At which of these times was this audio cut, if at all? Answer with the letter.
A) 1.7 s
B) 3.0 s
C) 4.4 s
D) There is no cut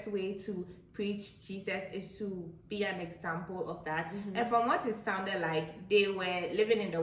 D